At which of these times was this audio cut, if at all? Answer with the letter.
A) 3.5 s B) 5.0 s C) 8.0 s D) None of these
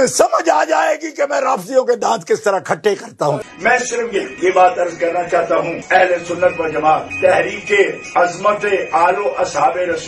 A